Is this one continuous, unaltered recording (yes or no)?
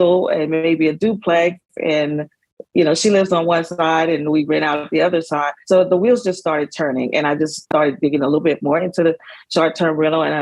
no